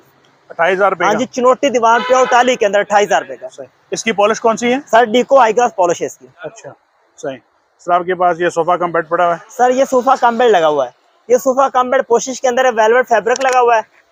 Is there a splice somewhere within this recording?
no; 0 cuts

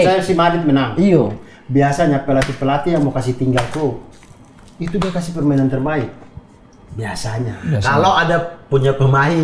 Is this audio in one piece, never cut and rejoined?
yes; 0 cuts

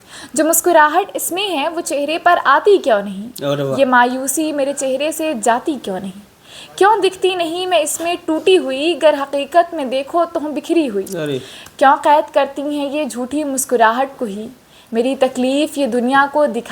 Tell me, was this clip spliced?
no; 0 cuts

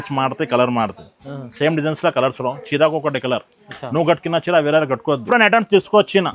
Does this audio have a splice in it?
yes; 1 cut; at 5.2 s

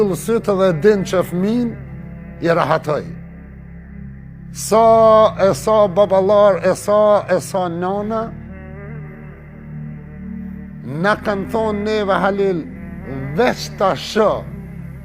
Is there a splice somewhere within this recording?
yes; 2 cuts; at 8.8 s, 10.9 s

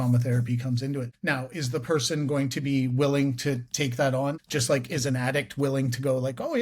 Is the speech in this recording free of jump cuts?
no; 2 cuts; at 1.1 s, 4.4 s

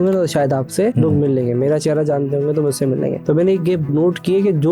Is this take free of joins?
no; 3 cuts; at 0.9 s, 3.2 s, 3.9 s

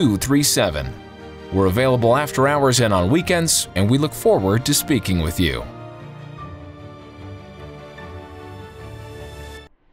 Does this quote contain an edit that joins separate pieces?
yes; 1 cut; at 5.7 s

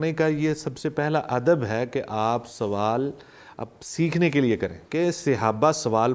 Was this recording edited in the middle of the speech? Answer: yes; 1 cut; at 4.8 s

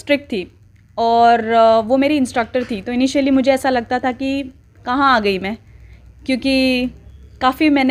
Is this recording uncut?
yes; 0 cuts

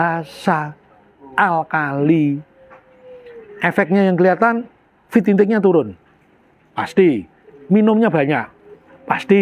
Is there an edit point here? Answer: no; 0 cuts

